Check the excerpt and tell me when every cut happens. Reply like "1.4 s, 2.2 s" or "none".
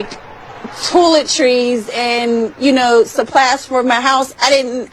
none